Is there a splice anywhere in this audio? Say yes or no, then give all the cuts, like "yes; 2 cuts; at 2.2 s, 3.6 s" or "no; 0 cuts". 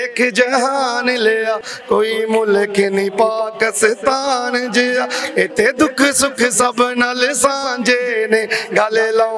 no; 0 cuts